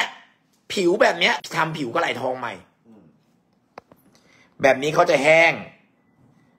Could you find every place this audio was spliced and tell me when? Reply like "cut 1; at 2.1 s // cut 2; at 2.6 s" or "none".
cut 1; at 1.4 s